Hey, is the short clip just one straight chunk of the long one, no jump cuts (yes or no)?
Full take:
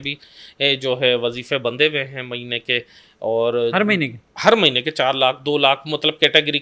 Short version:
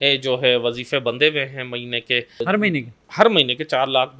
no